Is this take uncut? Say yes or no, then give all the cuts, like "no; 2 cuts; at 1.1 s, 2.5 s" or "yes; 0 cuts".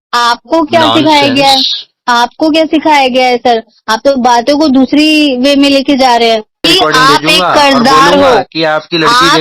no; 1 cut; at 6.6 s